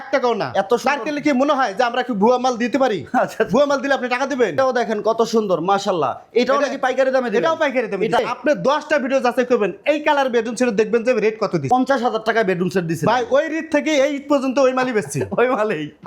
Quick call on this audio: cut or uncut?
cut